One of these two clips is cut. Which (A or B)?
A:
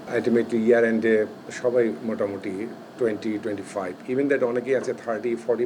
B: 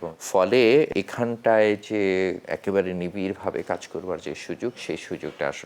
B